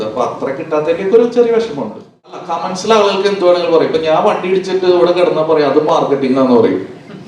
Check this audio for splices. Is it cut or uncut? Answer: cut